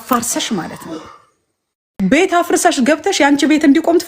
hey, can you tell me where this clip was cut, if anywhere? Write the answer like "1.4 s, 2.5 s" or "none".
2.0 s